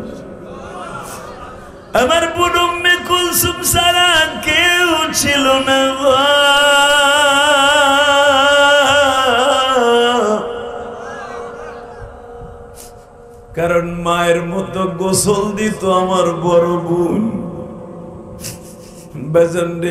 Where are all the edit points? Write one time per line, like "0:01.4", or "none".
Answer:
none